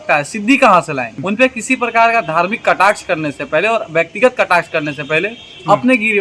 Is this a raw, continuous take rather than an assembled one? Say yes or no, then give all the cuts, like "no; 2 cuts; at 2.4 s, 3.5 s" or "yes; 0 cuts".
no; 1 cut; at 1.1 s